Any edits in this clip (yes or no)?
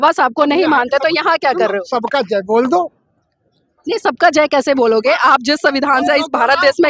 no